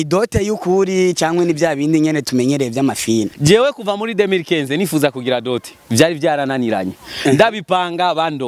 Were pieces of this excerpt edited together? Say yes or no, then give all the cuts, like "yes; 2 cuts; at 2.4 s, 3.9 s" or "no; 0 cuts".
yes; 1 cut; at 3.3 s